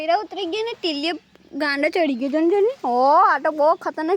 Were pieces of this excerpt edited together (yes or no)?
no